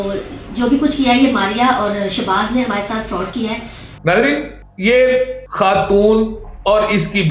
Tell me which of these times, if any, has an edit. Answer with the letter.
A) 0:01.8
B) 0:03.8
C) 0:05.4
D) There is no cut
B